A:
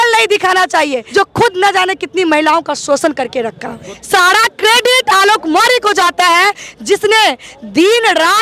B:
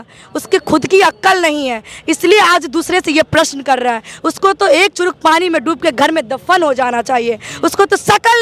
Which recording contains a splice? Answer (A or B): A